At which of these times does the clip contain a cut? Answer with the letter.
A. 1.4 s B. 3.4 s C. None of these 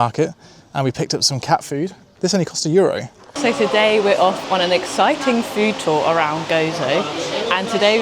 B